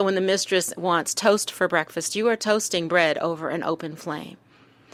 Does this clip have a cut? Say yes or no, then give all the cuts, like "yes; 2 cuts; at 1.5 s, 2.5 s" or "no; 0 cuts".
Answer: no; 0 cuts